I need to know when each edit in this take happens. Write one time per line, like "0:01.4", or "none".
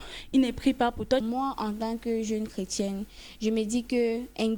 0:01.2